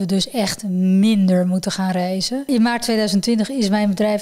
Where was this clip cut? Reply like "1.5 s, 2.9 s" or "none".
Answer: 2.5 s